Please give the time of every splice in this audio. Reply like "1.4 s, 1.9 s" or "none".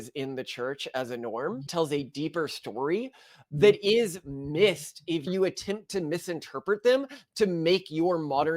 1.7 s, 3.3 s, 5.3 s

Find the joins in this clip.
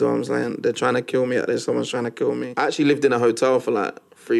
2.5 s

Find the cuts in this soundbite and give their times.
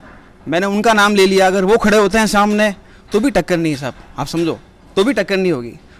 none

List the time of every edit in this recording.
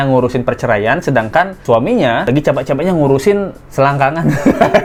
none

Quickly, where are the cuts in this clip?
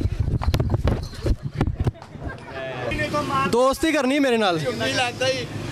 3.0 s

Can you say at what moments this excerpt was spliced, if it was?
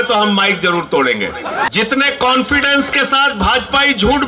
1.7 s

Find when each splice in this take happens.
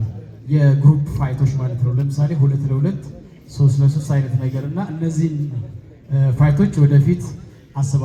none

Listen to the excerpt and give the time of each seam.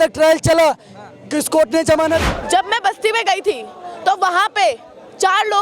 2.3 s

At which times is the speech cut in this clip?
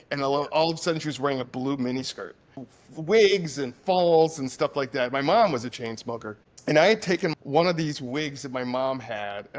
2.4 s, 7.3 s

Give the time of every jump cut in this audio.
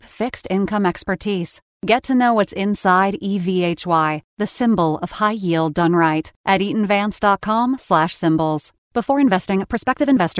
none

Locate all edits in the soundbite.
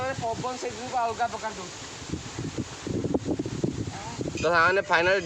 4.4 s

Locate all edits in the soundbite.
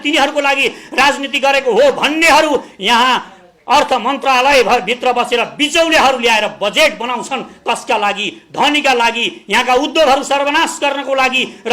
none

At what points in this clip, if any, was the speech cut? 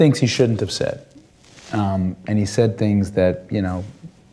1.3 s

